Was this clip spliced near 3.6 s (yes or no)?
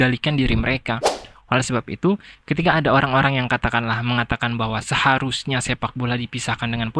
no